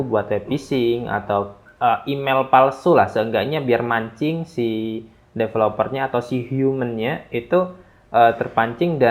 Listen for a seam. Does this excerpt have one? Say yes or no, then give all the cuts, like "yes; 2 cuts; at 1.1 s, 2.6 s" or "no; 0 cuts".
no; 0 cuts